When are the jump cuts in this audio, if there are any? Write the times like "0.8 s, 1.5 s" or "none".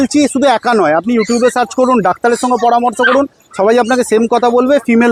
none